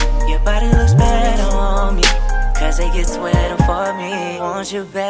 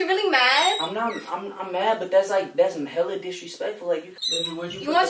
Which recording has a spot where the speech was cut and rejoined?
second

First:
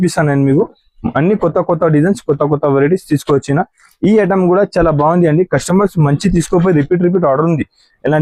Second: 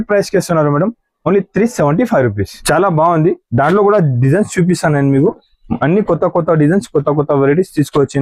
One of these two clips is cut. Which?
second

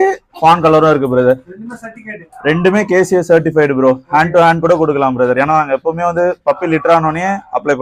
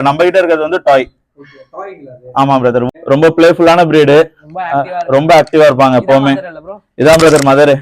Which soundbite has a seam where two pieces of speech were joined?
second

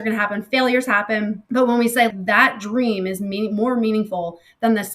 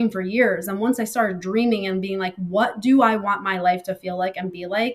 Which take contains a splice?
first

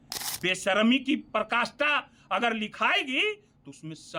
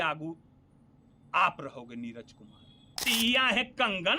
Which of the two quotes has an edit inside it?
second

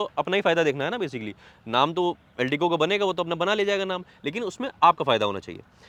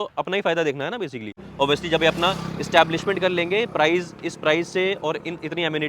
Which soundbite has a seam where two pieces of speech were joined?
second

